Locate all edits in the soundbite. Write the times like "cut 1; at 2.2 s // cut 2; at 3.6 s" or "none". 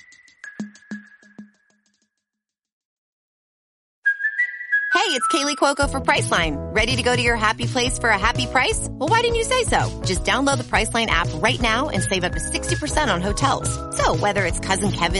none